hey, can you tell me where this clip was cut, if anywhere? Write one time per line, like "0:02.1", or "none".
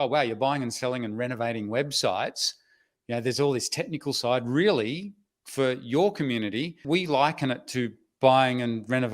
0:06.8